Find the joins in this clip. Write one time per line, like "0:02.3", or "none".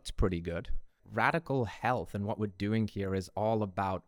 0:01.0